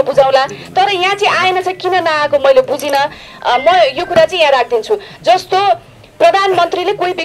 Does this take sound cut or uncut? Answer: uncut